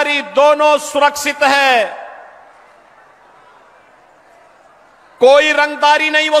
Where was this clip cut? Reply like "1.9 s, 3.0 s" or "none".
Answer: none